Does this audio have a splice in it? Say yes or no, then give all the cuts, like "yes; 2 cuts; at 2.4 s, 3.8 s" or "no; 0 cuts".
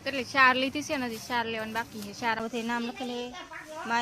yes; 1 cut; at 2.4 s